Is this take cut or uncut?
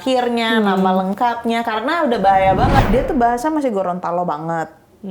cut